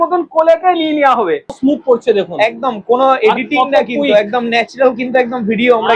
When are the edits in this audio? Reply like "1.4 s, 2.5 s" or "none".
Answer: 1.6 s